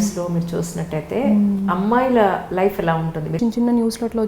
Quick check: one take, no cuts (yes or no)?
no